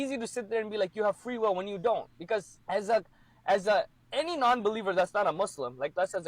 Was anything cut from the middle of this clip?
yes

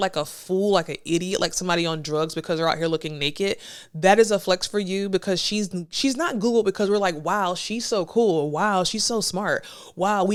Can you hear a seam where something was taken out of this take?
no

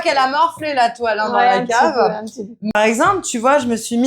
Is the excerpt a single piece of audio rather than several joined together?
no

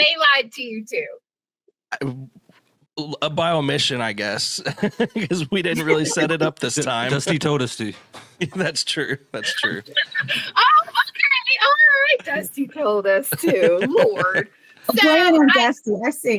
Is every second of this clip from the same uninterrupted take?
yes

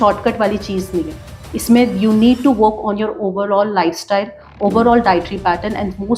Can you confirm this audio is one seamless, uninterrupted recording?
yes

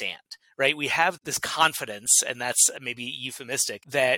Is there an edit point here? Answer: yes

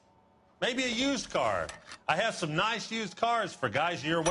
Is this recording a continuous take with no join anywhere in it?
yes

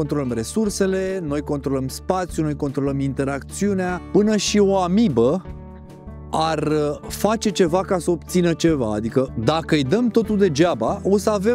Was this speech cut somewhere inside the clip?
yes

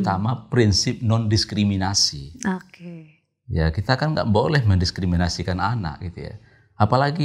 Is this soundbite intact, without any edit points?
yes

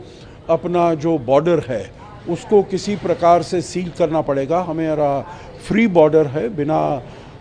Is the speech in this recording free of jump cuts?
yes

